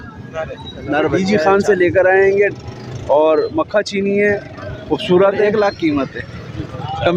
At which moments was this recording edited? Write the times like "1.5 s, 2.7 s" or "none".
1.2 s, 5.5 s